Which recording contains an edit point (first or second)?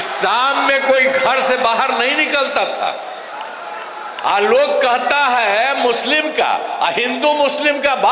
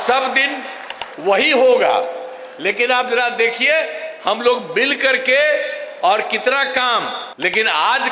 second